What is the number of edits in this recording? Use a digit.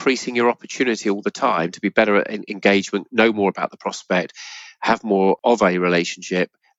1